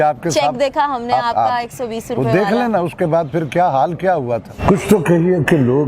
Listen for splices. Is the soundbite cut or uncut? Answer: cut